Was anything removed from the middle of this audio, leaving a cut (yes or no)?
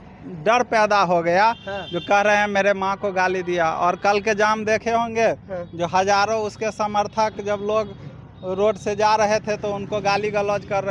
no